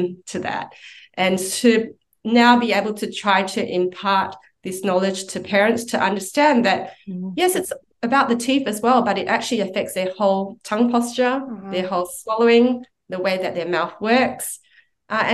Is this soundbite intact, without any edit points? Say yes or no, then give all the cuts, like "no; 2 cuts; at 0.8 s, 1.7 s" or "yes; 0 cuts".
yes; 0 cuts